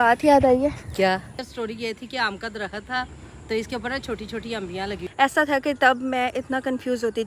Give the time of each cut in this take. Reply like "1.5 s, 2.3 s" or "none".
1.3 s, 5.0 s